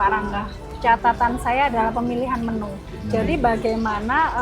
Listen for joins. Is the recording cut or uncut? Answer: cut